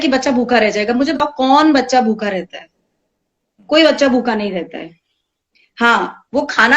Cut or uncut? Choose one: cut